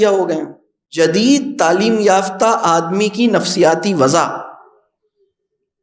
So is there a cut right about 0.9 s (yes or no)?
yes